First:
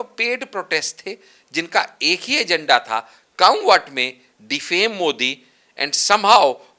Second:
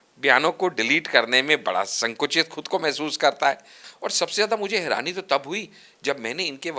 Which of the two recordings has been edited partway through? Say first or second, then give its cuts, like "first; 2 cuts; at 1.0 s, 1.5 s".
second; 1 cut; at 3.9 s